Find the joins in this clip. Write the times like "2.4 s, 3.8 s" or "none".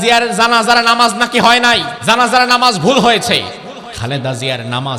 1.9 s, 3.9 s